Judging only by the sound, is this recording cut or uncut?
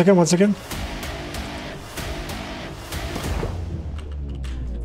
uncut